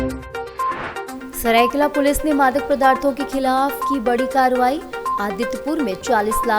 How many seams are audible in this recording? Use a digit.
1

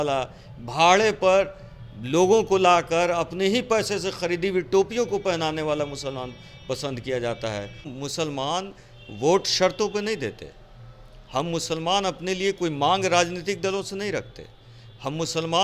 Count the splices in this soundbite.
1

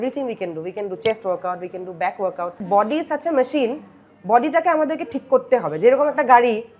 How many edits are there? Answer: 1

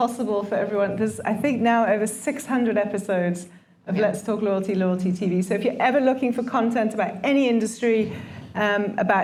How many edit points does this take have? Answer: 0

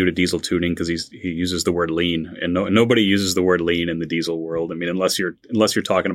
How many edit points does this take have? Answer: 0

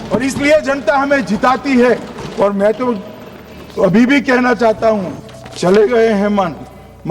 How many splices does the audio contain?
0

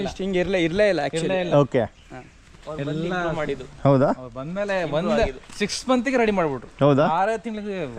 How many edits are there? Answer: 0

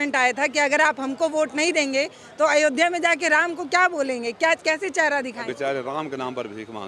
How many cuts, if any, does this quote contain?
1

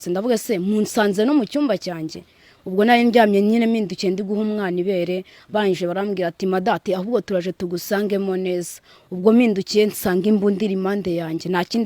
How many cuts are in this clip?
0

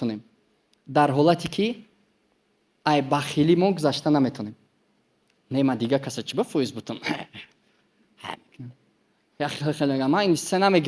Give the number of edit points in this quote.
0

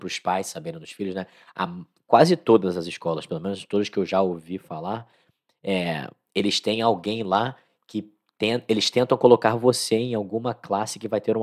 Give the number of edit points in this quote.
0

